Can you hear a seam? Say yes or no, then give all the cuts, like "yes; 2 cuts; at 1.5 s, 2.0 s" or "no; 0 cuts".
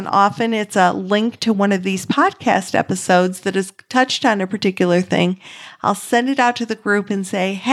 no; 0 cuts